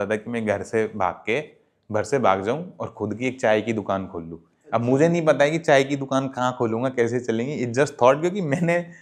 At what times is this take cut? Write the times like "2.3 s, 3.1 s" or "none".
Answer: none